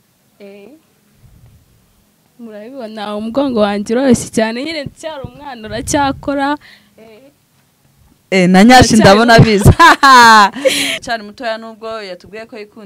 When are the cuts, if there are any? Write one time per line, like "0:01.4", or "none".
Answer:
0:11.0